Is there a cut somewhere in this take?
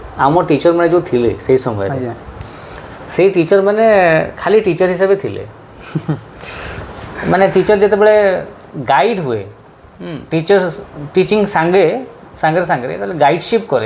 no; 0 cuts

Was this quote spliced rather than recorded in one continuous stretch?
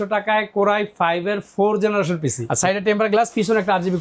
yes; 1 cut; at 2.4 s

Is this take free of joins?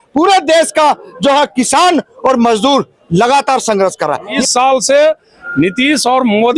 no; 1 cut; at 4.4 s

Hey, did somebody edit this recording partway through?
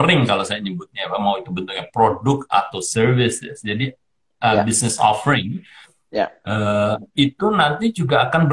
no; 0 cuts

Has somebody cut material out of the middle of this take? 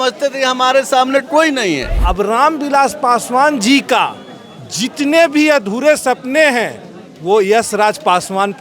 yes; 1 cut; at 1.9 s

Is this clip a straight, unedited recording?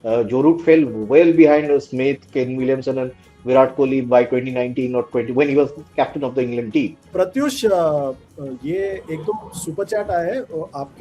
no; 1 cut; at 7.0 s

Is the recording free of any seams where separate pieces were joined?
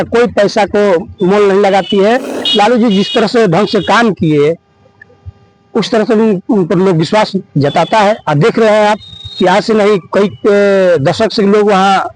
no; 1 cut; at 2.4 s

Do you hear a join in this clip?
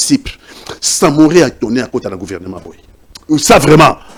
no; 0 cuts

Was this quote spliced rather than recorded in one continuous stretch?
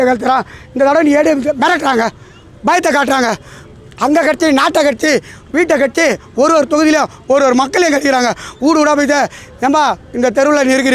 no; 0 cuts

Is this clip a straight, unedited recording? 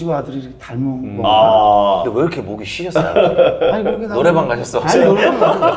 yes; 0 cuts

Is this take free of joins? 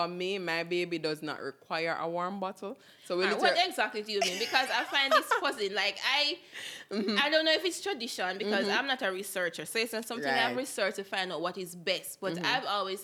yes; 0 cuts

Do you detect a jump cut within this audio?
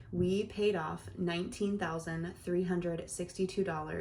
no; 0 cuts

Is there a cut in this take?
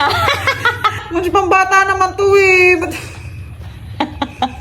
yes; 1 cut; at 1.0 s

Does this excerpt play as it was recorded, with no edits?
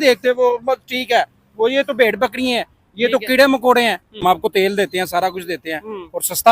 no; 1 cut; at 4.2 s

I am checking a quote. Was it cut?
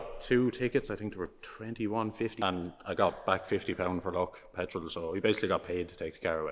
yes; 1 cut; at 2.4 s

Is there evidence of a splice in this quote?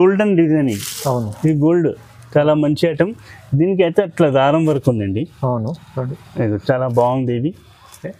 no; 0 cuts

